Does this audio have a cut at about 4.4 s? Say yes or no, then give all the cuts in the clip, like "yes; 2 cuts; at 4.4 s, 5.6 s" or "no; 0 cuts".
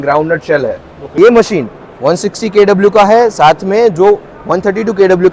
no; 1 cut; at 1.0 s